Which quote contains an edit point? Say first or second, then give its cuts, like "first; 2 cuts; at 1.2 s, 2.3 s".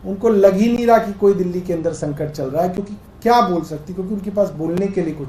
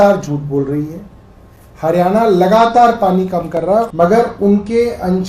second; 1 cut; at 3.9 s